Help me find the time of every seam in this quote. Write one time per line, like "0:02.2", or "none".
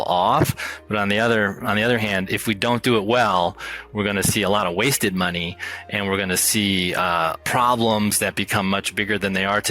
0:07.3